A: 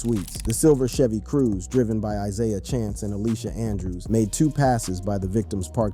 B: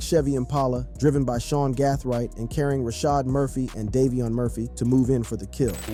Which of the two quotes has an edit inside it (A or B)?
A